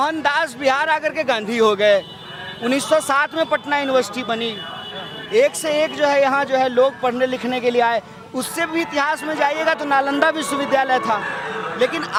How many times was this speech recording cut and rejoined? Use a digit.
0